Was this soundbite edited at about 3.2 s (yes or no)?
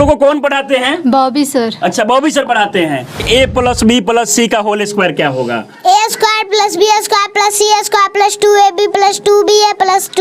yes